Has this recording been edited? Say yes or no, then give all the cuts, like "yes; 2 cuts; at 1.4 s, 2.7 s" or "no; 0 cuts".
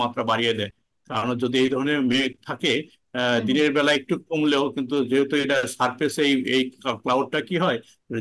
no; 0 cuts